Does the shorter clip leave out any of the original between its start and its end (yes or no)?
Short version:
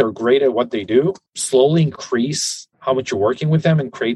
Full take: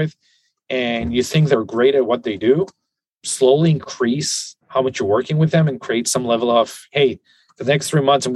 yes